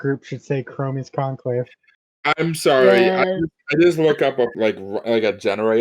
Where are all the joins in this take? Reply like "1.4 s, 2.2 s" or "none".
4.5 s